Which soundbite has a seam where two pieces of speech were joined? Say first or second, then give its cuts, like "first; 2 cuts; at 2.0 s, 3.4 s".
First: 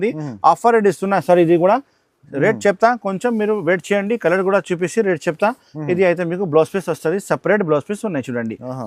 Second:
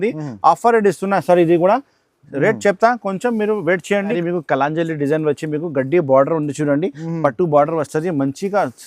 second; 1 cut; at 4.2 s